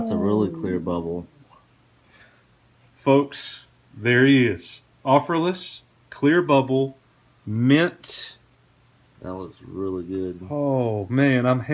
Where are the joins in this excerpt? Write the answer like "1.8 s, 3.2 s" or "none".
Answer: none

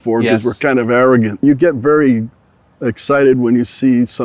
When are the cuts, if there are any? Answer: 1.4 s

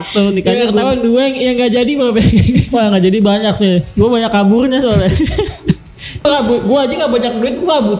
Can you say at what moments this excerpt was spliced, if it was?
6.2 s

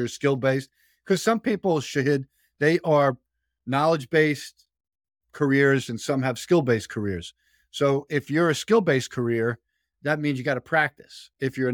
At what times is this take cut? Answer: none

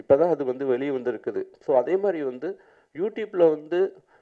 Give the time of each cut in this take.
none

